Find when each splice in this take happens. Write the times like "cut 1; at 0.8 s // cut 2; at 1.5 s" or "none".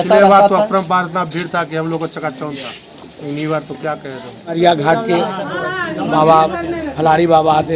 cut 1; at 4.6 s